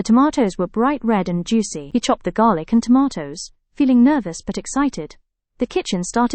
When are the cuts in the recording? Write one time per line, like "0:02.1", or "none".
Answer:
0:01.8